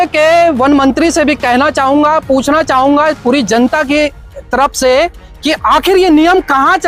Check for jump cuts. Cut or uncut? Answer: uncut